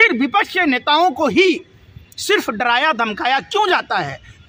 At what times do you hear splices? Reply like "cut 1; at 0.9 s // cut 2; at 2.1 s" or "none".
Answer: none